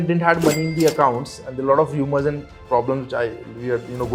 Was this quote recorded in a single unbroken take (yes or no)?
yes